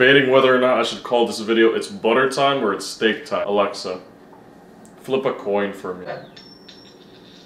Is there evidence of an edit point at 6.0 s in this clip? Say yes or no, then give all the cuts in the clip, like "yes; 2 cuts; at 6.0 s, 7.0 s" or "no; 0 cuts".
yes; 2 cuts; at 3.4 s, 6.0 s